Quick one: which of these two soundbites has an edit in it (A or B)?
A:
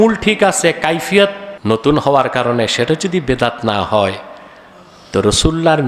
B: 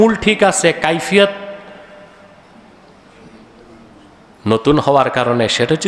A